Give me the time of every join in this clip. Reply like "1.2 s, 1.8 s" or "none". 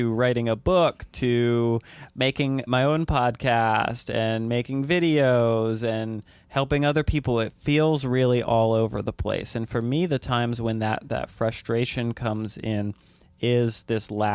2.6 s